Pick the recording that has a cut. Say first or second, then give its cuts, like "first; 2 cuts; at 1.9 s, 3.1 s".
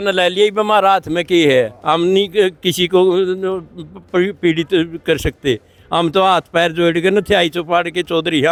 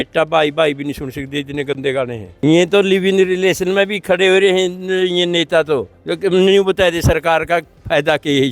second; 1 cut; at 2.3 s